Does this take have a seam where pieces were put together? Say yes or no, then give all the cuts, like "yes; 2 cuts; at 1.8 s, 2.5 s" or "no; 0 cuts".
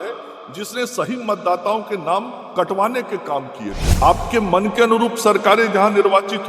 yes; 1 cut; at 3.9 s